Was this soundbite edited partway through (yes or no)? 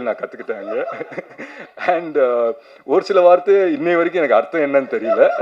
no